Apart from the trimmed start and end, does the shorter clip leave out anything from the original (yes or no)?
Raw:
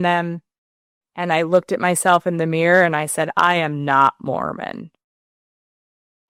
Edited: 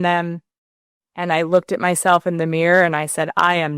no